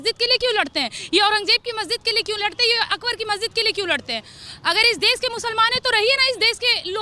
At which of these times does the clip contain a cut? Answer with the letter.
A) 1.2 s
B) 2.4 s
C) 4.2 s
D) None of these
D